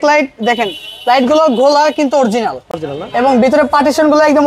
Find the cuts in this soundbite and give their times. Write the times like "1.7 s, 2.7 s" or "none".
none